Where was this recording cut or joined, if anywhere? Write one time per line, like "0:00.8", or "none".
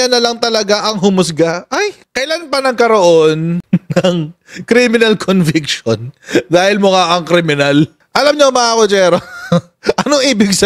0:02.0
0:08.0